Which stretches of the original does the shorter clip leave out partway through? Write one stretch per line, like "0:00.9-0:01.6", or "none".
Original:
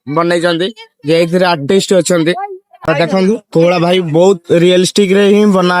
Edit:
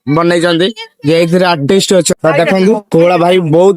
0:02.1-0:02.7

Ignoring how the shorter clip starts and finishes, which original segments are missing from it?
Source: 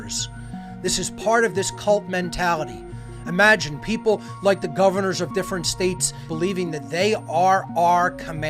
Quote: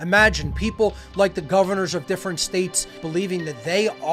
none

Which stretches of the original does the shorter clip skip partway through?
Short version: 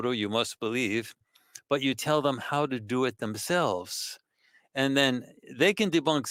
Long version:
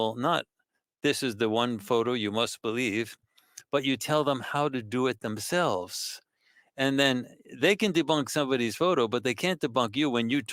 none

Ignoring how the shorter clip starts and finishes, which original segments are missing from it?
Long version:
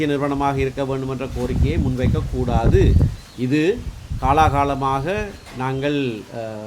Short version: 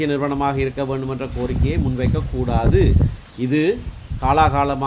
none

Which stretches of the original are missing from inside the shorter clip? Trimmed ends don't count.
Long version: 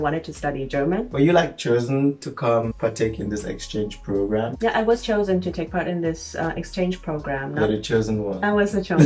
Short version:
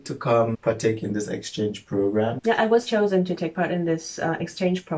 none

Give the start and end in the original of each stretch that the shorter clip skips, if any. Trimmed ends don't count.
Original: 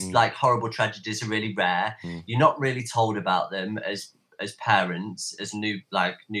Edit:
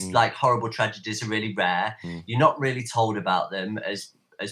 none

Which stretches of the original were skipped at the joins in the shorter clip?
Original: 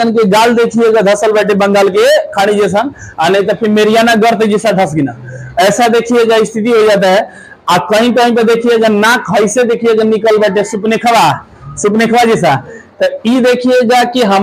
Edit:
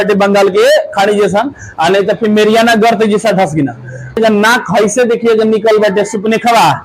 0:05.6-0:08.8

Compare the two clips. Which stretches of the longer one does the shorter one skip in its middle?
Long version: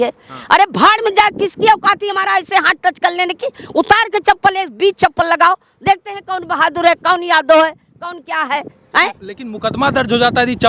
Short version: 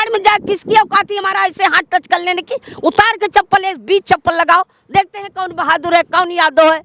none

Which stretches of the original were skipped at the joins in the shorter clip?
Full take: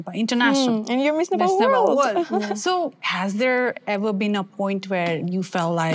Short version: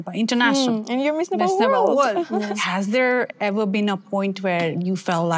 0:02.5-0:03.0

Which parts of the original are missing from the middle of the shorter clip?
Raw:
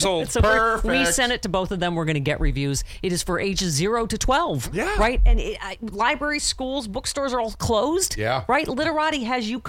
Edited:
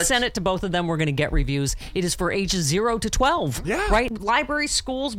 0:05.2-0:05.9

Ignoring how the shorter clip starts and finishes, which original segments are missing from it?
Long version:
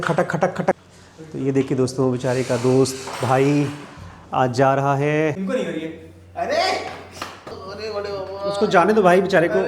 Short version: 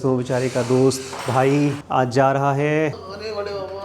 0:03.8-0:04.2
0:05.4-0:07.6

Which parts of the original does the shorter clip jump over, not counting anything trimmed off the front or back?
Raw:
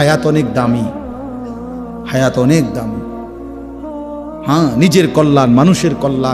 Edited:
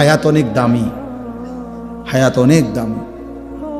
none

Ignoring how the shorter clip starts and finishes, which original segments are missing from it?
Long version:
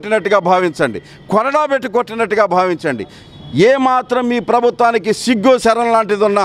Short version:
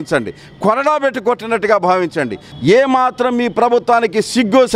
0:03.1-0:03.3

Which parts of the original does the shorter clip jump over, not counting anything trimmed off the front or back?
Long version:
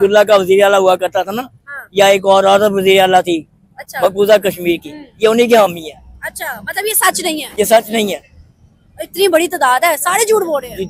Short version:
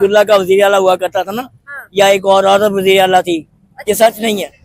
0:03.7-0:07.4

